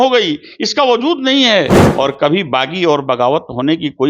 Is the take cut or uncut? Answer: cut